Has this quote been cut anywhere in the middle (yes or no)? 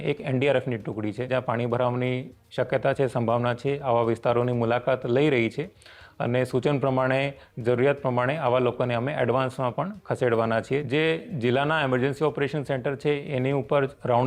yes